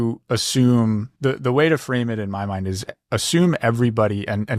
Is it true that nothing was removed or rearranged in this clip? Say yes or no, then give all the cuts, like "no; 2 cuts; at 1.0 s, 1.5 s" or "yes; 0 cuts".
no; 1 cut; at 1.1 s